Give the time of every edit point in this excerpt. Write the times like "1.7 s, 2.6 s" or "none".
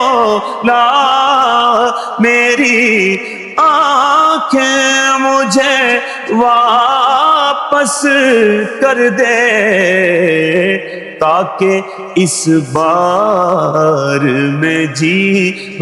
none

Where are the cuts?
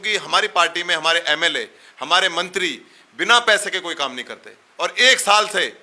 none

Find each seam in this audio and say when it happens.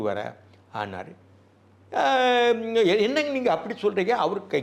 none

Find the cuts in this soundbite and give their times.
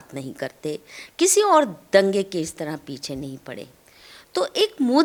none

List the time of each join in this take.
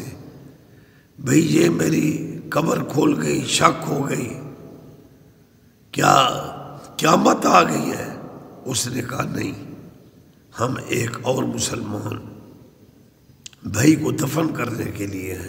none

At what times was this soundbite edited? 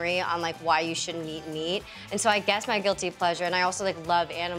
none

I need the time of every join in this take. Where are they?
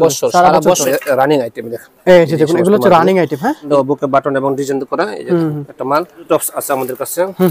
0.8 s, 3.7 s, 6.3 s

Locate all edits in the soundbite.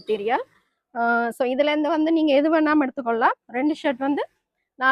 none

